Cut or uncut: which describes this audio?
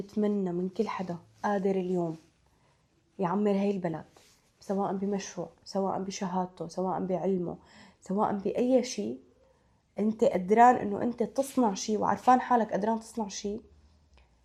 uncut